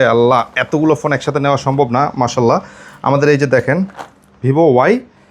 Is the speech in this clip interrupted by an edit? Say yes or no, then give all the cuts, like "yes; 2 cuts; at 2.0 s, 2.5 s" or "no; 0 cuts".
no; 0 cuts